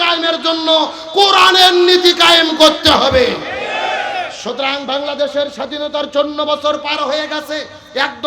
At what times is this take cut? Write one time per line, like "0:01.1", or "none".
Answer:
none